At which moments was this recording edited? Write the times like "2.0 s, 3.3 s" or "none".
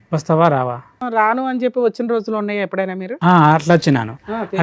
1.0 s